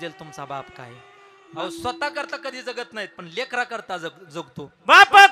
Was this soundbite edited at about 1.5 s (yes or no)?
yes